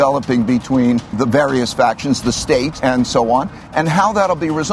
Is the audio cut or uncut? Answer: cut